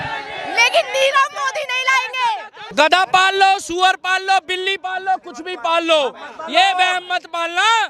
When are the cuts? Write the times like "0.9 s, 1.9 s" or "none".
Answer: 2.6 s